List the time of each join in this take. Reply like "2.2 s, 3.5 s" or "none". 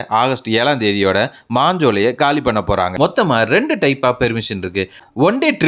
2.9 s

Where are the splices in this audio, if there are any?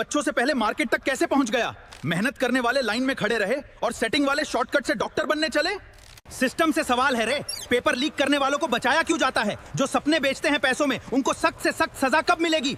6.2 s

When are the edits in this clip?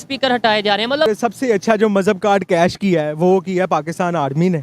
1.1 s

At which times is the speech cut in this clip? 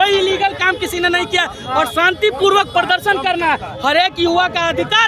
none

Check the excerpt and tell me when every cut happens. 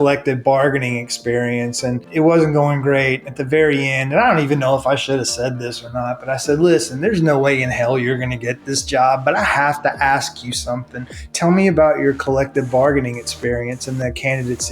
2.1 s

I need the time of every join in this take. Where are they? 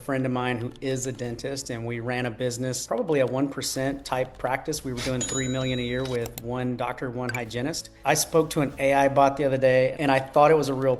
2.8 s, 7.9 s, 10.0 s

